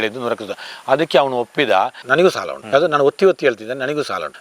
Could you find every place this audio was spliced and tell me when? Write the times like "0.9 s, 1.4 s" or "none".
2.0 s